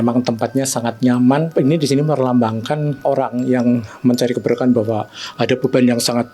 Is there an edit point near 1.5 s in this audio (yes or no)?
yes